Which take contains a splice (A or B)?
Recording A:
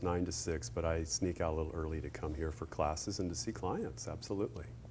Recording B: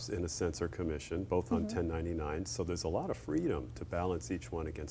A